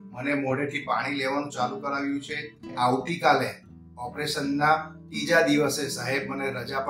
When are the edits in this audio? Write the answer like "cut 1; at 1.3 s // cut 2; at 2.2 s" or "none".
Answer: cut 1; at 2.7 s